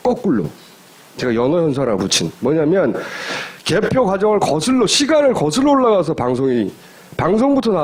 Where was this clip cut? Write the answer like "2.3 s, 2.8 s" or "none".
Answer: none